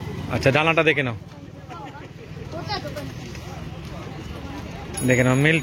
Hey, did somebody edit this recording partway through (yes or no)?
no